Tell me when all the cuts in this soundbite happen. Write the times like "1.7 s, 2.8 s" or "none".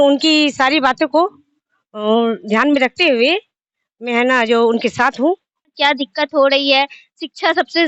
5.7 s